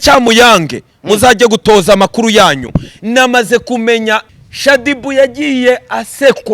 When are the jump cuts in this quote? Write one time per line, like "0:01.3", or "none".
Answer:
0:04.4